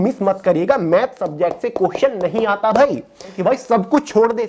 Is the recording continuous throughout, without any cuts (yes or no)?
no